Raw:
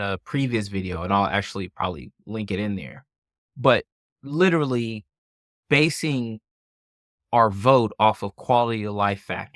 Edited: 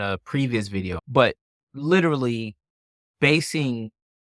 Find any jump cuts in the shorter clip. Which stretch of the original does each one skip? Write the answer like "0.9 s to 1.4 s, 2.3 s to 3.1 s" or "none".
1.0 s to 3.5 s